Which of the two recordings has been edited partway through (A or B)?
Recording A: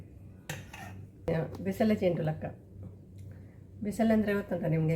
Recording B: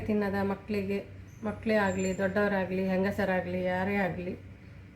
A